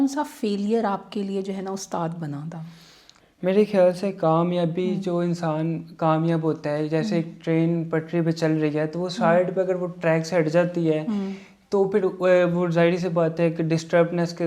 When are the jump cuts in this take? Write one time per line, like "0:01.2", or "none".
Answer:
none